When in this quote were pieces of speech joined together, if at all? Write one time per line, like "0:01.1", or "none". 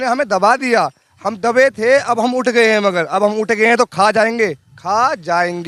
none